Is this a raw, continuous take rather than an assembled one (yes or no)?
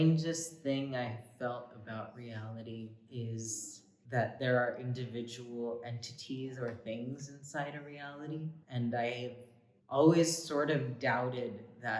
no